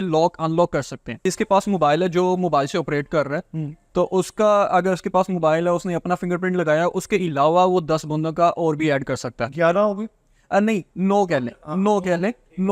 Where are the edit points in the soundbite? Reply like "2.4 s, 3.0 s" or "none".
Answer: 1.2 s